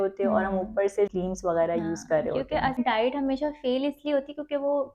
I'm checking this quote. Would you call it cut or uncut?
cut